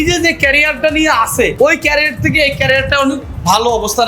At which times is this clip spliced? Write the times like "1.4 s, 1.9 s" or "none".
1.5 s